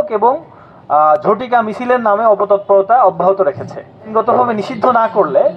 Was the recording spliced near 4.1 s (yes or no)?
yes